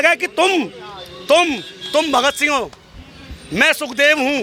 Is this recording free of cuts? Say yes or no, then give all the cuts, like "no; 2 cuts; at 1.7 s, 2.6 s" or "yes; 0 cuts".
yes; 0 cuts